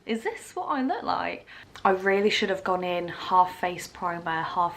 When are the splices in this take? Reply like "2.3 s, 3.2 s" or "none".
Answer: 1.6 s